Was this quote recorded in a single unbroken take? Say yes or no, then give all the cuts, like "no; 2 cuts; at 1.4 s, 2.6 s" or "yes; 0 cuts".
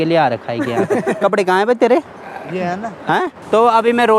yes; 0 cuts